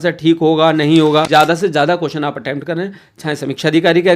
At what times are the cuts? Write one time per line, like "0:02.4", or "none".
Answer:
0:01.3